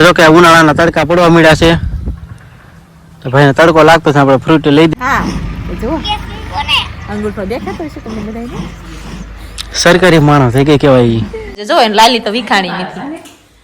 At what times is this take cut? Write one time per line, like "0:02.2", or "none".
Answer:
0:04.9
0:11.6